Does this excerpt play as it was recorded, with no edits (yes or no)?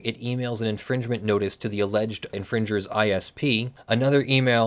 no